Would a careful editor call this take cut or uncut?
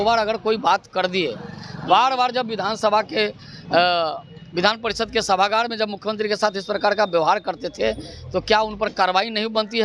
uncut